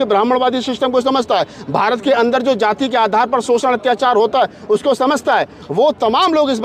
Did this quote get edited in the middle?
no; 0 cuts

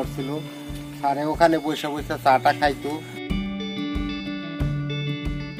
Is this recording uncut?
no; 1 cut; at 3.2 s

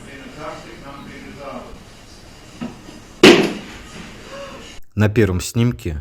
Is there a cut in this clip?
yes; 1 cut; at 4.8 s

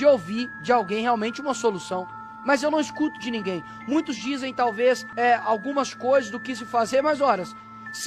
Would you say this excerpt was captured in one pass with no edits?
no; 1 cut; at 4.9 s

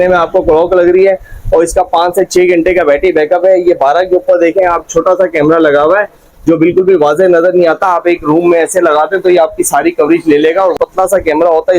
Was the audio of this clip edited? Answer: yes; 1 cut; at 10.8 s

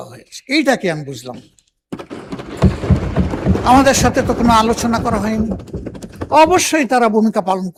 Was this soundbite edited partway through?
no; 0 cuts

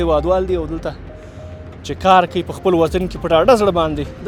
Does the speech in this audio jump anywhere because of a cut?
no; 0 cuts

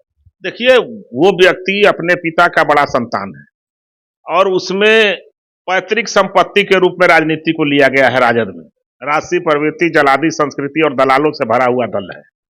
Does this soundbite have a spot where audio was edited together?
no; 0 cuts

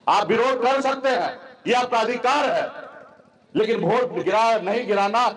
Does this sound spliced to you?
no; 0 cuts

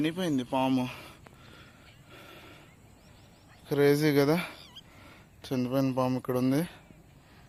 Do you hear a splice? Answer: no; 0 cuts

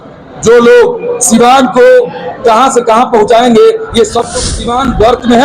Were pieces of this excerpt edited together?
yes; 1 cut; at 4.3 s

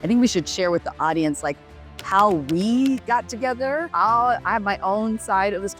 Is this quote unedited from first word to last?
no; 1 cut; at 3.9 s

